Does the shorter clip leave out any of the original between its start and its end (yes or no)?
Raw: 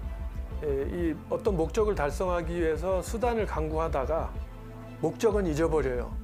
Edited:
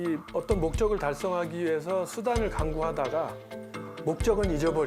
no